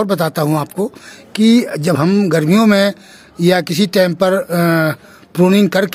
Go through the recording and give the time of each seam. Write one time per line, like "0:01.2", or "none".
none